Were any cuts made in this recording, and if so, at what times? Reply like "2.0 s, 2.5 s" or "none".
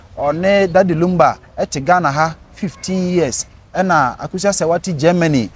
none

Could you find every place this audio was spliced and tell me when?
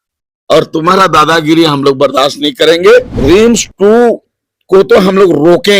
3.1 s

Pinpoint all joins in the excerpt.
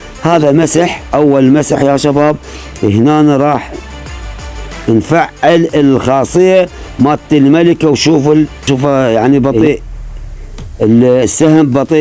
8.6 s

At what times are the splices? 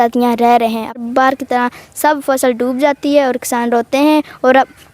1.0 s

